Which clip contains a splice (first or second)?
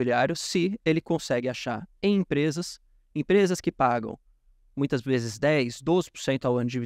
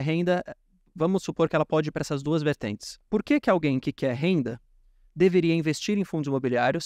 second